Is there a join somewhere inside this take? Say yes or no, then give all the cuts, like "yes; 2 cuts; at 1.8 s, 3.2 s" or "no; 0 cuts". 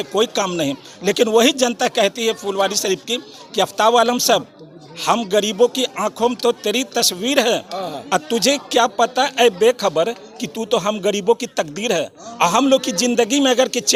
no; 0 cuts